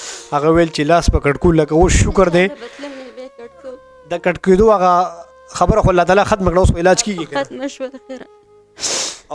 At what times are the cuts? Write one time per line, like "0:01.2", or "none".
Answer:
none